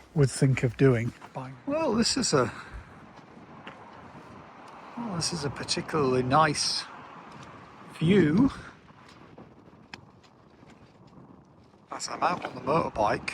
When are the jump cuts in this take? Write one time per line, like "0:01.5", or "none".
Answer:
0:01.2